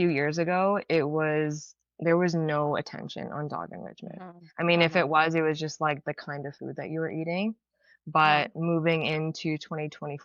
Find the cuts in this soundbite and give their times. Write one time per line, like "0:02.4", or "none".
none